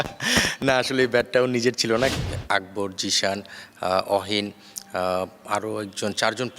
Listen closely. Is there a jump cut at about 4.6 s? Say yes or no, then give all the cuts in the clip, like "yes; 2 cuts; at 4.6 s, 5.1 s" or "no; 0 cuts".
no; 1 cut; at 2.2 s